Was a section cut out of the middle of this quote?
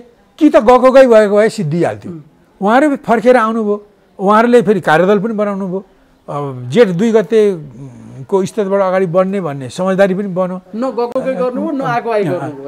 no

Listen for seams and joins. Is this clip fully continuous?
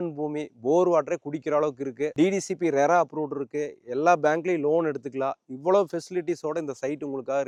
yes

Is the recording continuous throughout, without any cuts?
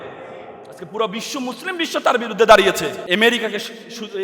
no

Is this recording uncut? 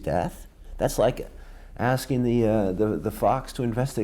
yes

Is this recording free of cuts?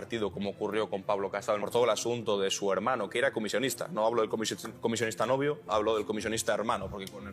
no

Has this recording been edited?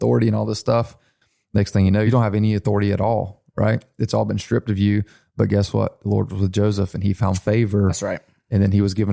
yes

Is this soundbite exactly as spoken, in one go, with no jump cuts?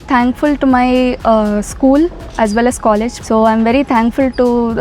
no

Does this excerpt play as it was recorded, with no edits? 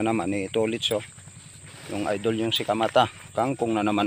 yes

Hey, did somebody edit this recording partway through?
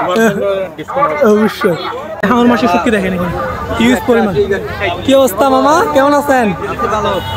yes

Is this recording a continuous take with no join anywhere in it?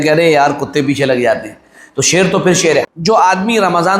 no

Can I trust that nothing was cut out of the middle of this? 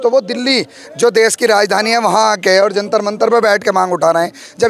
yes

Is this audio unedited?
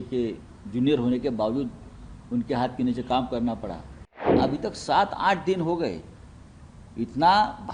no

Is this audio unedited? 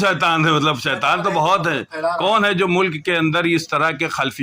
yes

